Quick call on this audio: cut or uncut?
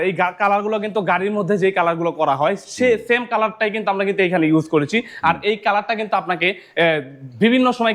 uncut